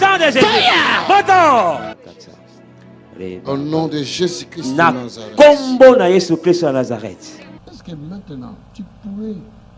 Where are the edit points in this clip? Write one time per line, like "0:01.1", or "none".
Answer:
0:07.6